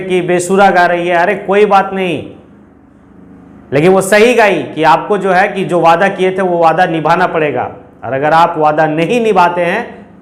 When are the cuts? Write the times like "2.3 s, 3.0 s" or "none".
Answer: none